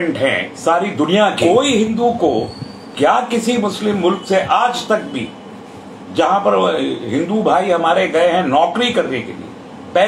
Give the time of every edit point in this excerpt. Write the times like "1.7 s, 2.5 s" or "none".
1.4 s